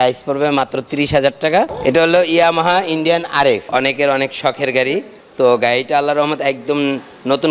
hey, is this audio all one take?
no; 3 cuts; at 1.7 s, 3.6 s, 5.2 s

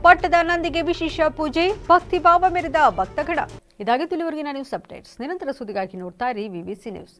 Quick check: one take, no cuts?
yes; 0 cuts

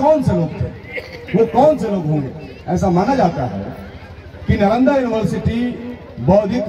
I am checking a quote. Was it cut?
no; 0 cuts

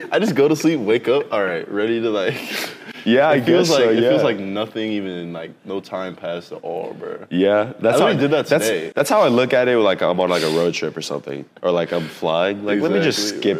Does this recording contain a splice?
no; 0 cuts

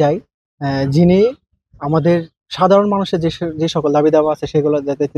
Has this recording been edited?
no; 0 cuts

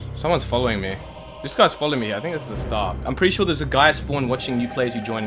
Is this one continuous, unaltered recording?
no; 1 cut; at 3.0 s

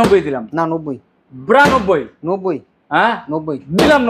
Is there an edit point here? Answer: no; 0 cuts

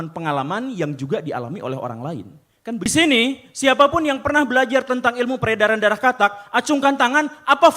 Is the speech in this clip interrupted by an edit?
yes; 1 cut; at 2.9 s

